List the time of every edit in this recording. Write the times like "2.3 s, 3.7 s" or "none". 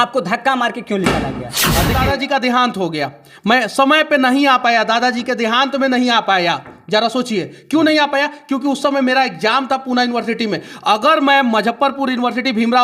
1.9 s